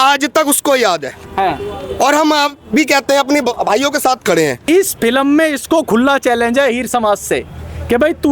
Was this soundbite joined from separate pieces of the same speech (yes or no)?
yes